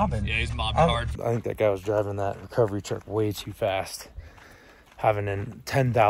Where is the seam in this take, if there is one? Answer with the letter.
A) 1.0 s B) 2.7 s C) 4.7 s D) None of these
A